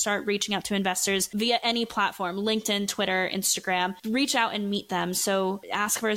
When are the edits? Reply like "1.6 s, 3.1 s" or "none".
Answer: none